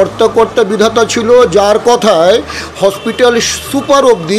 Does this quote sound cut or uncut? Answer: uncut